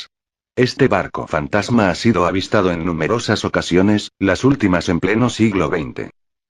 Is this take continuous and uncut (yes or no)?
no